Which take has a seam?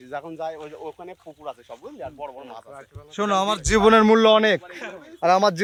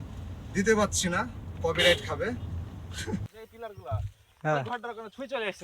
second; 1 cut; at 3.4 s

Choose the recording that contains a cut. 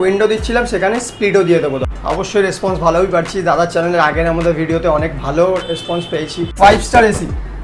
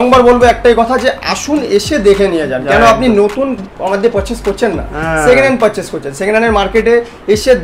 first; 2 cuts; at 1.8 s, 6.5 s

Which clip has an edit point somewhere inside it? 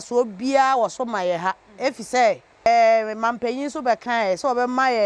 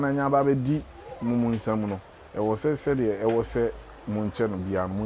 first; 1 cut; at 2.7 s

